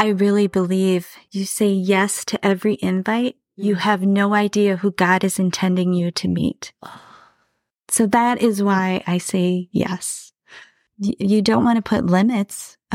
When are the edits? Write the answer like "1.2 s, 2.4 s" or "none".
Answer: 1.2 s